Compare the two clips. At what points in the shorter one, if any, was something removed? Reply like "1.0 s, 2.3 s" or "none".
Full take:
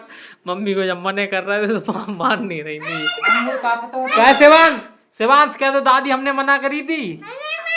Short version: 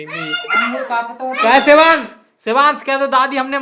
none